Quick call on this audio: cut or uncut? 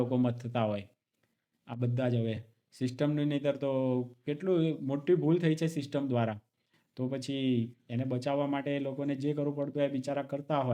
uncut